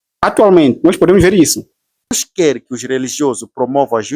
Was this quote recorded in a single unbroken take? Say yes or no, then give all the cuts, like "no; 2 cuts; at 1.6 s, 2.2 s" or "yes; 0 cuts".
no; 1 cut; at 2.2 s